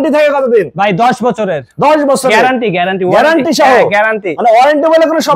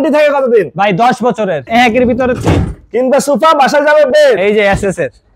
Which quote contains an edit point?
second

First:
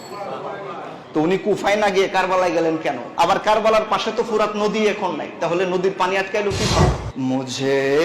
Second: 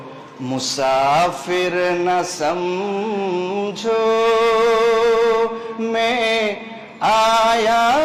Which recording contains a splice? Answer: first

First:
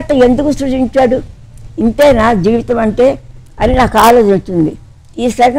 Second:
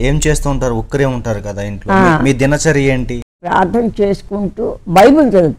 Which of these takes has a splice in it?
second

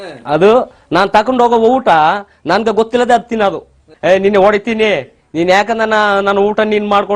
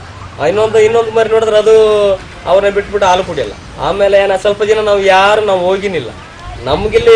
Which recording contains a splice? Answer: first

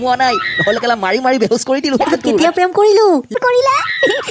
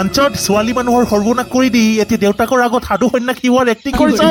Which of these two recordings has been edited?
first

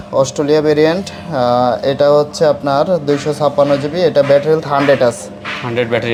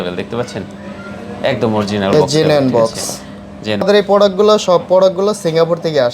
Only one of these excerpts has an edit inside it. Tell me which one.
second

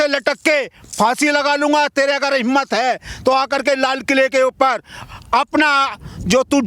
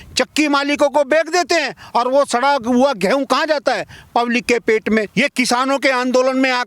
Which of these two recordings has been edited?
second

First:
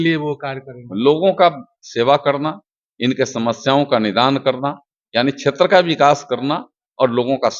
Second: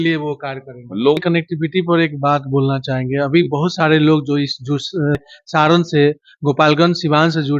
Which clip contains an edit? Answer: second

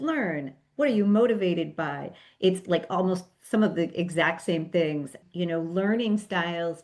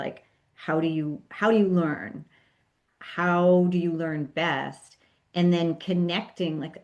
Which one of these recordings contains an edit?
first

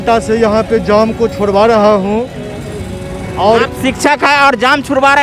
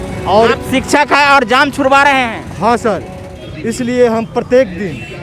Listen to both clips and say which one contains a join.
second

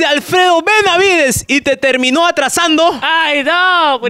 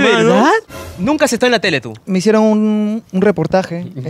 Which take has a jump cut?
second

